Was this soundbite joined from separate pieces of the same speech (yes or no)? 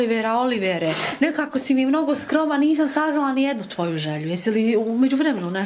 no